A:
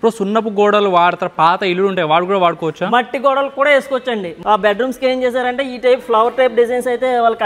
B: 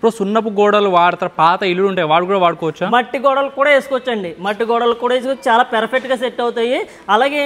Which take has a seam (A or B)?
A